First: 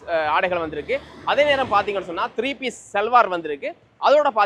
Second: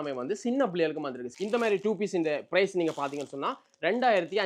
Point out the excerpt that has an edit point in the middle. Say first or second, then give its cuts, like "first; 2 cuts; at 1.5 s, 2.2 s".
second; 1 cut; at 1.2 s